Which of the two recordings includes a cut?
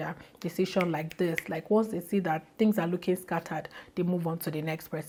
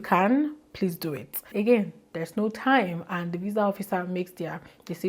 second; 1 cut; at 1.5 s

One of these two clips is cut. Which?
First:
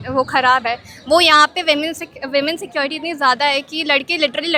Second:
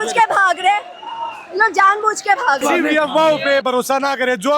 second; 1 cut; at 2.6 s

